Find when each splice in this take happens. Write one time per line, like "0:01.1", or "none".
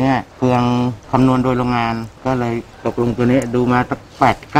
none